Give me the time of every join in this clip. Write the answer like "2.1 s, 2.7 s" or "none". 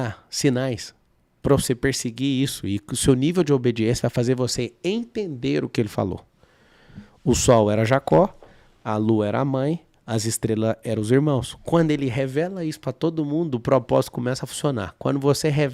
none